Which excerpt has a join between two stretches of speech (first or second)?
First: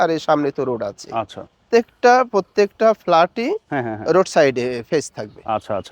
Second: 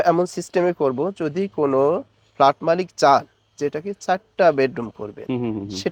first